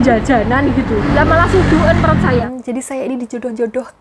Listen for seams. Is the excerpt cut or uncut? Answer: cut